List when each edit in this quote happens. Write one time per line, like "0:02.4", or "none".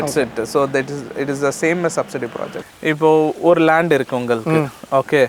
0:02.5